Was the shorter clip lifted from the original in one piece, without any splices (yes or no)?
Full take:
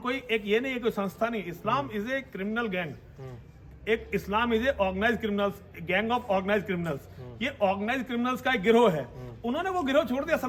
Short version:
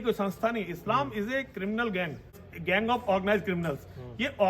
no